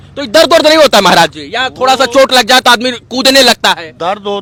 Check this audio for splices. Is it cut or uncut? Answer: uncut